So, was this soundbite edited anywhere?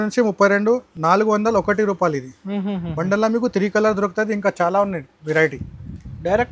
no; 0 cuts

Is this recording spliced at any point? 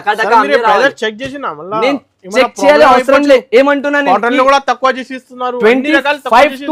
no; 0 cuts

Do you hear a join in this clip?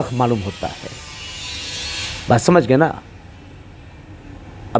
no; 0 cuts

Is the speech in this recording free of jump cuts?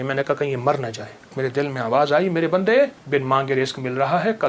no; 2 cuts; at 1.3 s, 3.0 s

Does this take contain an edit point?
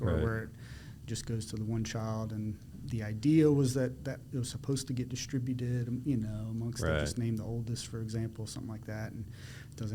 no; 0 cuts

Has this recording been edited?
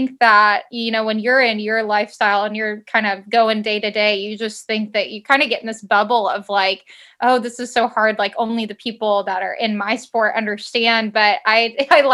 no; 0 cuts

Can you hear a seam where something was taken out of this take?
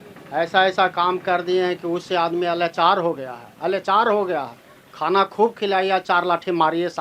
no; 0 cuts

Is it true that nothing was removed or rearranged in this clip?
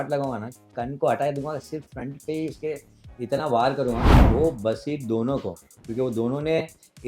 no; 1 cut; at 4.1 s

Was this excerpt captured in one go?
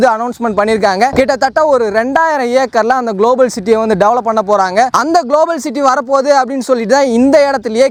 yes; 0 cuts

